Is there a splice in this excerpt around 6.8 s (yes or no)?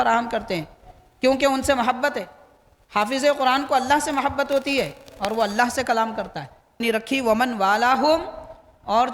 yes